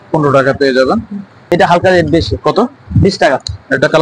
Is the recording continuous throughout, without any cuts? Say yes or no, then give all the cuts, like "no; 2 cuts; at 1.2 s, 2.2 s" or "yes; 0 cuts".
no; 1 cut; at 1.5 s